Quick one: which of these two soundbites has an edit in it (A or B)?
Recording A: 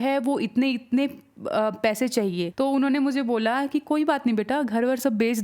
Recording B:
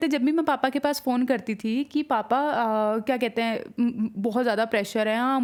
A